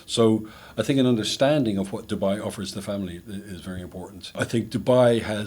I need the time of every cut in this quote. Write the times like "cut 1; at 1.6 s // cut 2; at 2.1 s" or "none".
cut 1; at 4.4 s